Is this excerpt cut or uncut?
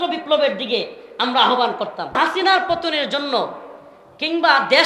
cut